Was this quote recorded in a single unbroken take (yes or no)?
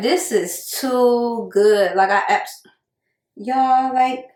yes